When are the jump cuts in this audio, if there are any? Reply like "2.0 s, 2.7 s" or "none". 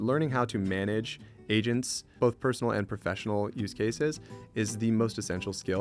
2.0 s